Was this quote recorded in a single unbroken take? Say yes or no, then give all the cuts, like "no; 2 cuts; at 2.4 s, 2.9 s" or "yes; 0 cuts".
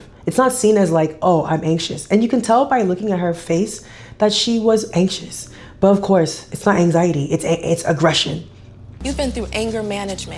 no; 1 cut; at 8.9 s